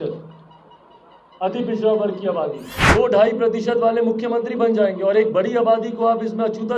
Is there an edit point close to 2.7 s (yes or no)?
yes